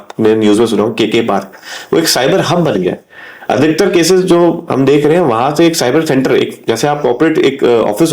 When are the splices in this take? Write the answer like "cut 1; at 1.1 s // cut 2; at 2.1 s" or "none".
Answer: none